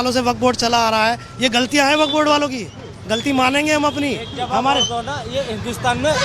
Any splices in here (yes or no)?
no